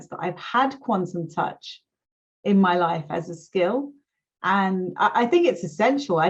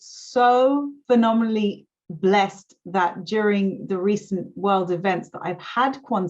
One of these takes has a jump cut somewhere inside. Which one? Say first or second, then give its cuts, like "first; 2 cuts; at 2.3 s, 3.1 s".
second; 1 cut; at 0.9 s